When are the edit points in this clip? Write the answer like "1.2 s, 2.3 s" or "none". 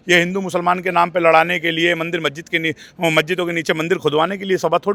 none